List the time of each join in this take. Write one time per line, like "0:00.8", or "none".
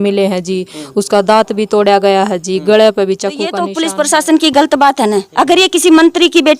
0:03.6